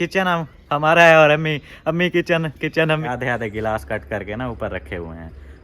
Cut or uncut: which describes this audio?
cut